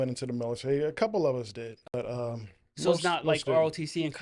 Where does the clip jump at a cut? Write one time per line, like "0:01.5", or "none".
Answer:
0:01.9